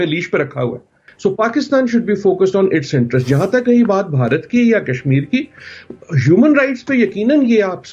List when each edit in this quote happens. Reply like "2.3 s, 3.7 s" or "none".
1.0 s